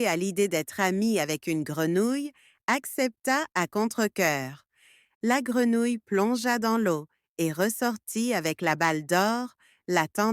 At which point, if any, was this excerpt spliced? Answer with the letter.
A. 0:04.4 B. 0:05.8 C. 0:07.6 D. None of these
B